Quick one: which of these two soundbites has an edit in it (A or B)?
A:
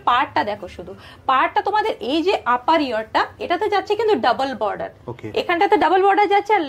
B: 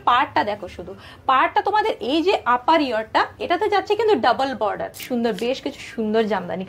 B